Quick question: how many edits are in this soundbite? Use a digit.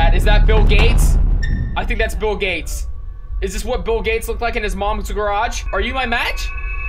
1